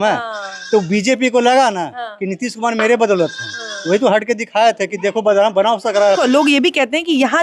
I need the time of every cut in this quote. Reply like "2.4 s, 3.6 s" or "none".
6.2 s